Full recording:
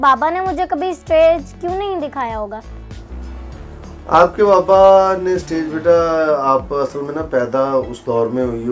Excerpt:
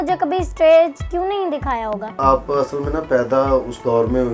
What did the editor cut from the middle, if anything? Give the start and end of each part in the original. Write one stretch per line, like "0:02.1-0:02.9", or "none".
0:02.7-0:06.4